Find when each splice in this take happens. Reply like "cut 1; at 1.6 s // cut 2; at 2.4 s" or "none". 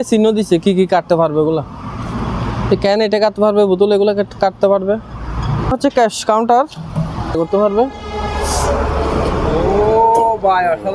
cut 1; at 5.7 s // cut 2; at 7.4 s